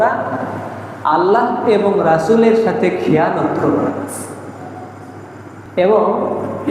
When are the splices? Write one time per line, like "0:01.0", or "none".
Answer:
0:05.7